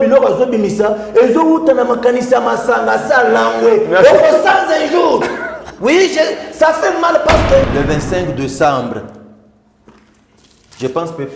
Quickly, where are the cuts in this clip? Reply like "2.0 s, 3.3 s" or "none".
7.7 s